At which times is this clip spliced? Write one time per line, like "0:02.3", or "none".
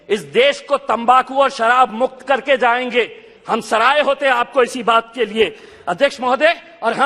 none